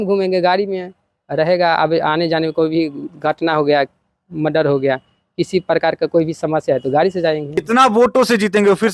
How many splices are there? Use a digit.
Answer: 1